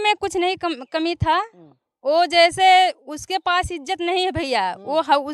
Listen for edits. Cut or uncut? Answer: uncut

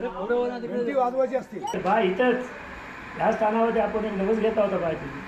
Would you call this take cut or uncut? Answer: cut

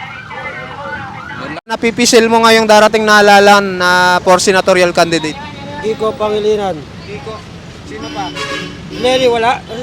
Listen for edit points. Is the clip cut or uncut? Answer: cut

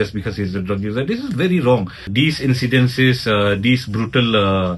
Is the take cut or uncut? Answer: cut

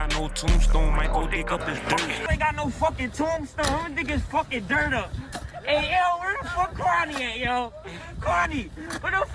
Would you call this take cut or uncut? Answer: uncut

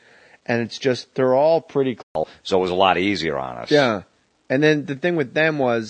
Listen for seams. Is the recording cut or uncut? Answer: uncut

